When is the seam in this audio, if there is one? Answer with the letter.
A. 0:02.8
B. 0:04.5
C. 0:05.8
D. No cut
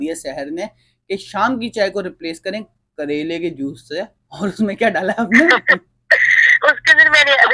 D